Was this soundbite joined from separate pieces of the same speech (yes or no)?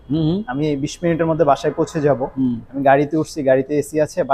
no